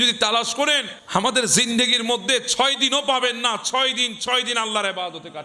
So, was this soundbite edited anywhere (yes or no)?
yes